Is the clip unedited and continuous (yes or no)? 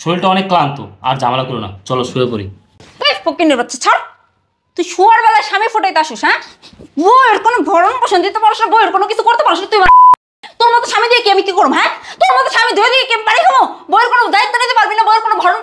yes